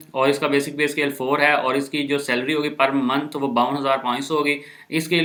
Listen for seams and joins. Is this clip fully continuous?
yes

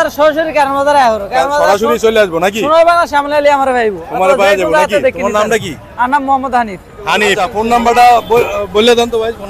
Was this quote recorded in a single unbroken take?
no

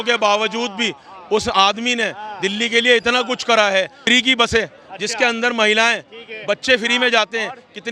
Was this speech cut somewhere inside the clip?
yes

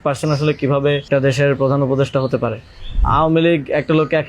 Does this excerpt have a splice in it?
yes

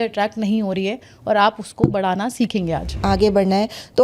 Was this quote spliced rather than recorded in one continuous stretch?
yes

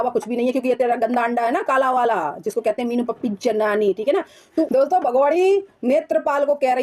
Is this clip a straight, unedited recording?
no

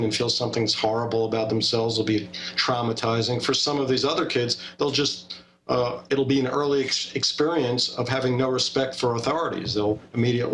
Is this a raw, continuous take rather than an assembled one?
no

